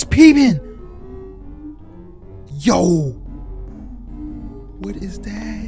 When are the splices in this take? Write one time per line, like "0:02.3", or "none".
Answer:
none